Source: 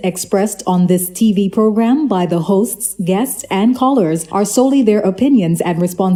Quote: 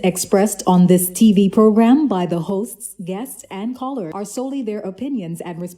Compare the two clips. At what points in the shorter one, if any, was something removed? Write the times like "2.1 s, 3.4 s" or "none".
4.1 s